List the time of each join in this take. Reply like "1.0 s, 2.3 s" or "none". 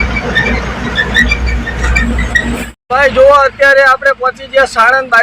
2.8 s